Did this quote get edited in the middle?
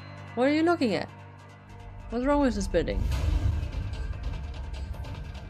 no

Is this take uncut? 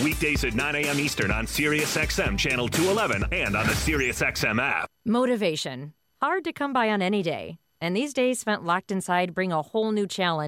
no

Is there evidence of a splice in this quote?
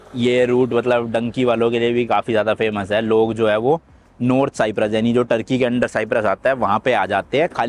no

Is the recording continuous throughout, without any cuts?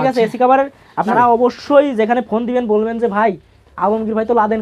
no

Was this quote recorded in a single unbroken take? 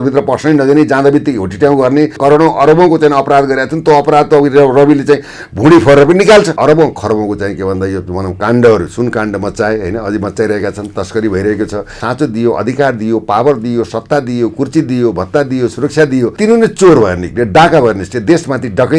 no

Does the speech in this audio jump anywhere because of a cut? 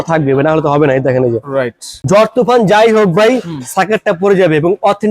yes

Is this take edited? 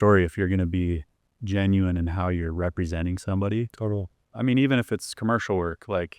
yes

